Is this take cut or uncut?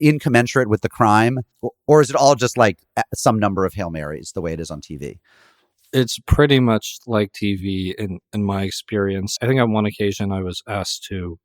cut